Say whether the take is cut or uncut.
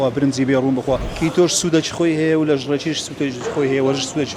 cut